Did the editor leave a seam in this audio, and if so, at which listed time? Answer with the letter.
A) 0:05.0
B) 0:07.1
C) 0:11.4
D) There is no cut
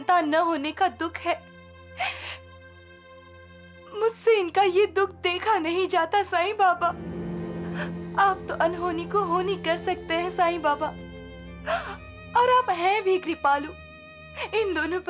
B